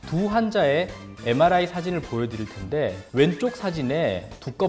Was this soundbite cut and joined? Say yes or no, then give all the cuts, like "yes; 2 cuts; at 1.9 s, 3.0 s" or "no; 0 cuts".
no; 0 cuts